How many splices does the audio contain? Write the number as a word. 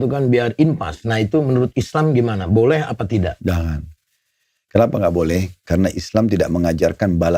zero